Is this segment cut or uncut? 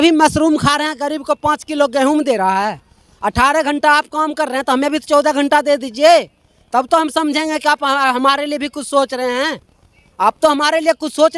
uncut